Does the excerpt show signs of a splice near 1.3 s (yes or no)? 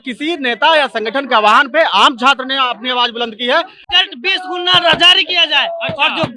no